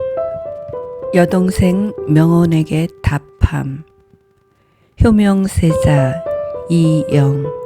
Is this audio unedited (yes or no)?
no